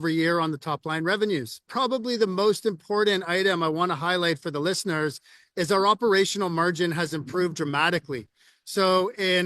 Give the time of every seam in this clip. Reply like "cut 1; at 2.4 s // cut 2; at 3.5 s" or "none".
cut 1; at 1.7 s